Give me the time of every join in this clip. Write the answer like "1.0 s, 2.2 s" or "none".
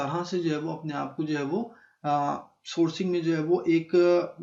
none